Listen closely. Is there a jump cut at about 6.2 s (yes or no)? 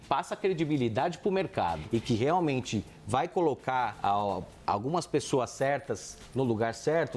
no